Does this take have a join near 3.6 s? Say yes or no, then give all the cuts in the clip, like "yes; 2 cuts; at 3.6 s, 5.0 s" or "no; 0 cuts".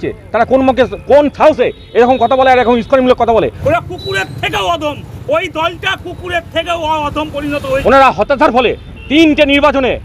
yes; 2 cuts; at 3.6 s, 7.8 s